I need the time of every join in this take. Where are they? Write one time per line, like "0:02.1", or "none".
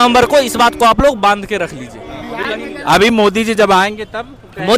none